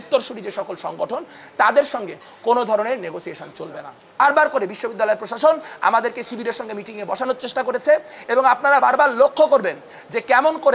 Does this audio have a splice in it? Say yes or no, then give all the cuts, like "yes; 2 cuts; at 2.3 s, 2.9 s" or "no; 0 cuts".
yes; 1 cut; at 4.2 s